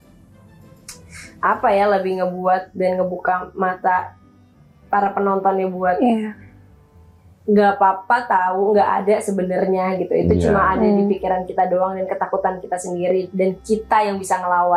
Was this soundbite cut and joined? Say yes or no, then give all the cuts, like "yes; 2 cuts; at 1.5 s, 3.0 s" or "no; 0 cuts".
no; 0 cuts